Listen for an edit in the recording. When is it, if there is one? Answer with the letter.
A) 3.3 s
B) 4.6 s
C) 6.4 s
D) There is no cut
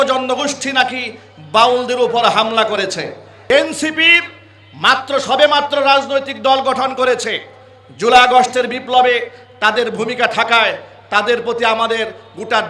A